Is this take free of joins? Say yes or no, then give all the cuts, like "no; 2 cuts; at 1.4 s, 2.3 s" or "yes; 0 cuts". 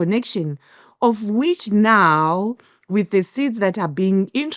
yes; 0 cuts